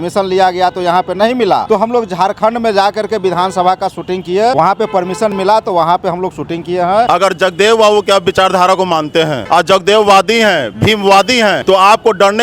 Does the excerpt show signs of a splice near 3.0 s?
no; 5 cuts; at 1.6 s, 4.5 s, 7.1 s, 9.4 s, 11.6 s

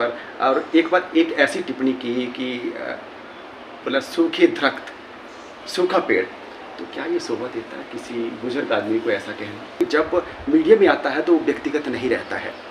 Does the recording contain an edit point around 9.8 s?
yes; 1 cut; at 9.8 s

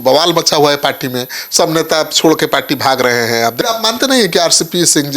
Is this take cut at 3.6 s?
yes; 1 cut; at 3.6 s

